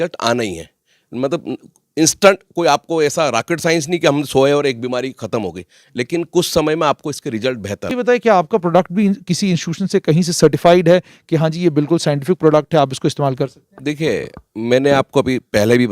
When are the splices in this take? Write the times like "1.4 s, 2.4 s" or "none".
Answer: 7.9 s